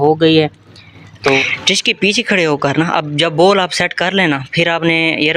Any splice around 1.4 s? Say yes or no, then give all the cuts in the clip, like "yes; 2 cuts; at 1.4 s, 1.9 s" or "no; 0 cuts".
yes; 1 cut; at 1.4 s